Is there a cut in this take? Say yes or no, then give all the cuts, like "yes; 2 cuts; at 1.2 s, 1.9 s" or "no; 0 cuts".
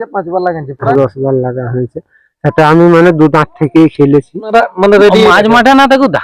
yes; 2 cuts; at 0.9 s, 4.5 s